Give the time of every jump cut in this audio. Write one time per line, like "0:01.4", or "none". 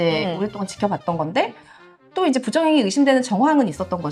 none